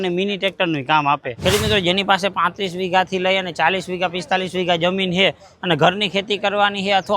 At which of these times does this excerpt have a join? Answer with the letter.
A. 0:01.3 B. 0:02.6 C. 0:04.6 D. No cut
A